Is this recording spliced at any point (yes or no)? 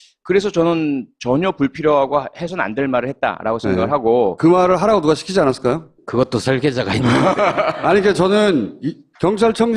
no